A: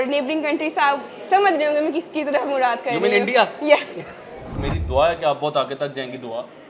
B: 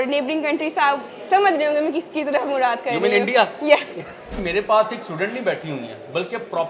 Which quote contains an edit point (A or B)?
B